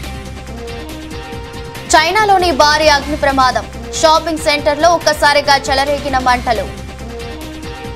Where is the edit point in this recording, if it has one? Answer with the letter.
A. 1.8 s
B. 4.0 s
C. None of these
A